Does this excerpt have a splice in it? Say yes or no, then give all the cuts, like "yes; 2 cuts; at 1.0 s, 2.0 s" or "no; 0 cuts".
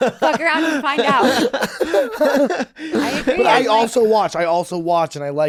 no; 0 cuts